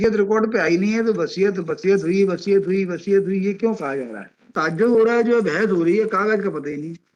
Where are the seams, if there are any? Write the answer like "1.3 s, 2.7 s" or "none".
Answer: 4.8 s